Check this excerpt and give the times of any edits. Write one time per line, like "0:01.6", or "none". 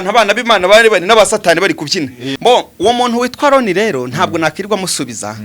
0:02.2